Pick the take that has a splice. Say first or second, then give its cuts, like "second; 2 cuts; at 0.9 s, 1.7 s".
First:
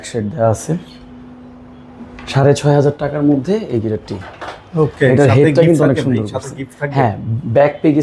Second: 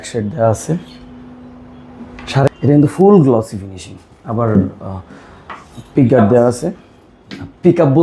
second; 1 cut; at 2.5 s